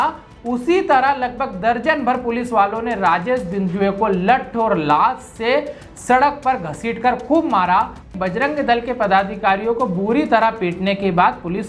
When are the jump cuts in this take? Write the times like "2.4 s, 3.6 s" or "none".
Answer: 8.1 s